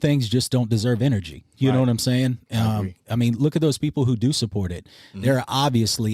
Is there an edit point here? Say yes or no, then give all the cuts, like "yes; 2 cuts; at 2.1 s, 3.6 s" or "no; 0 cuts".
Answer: no; 0 cuts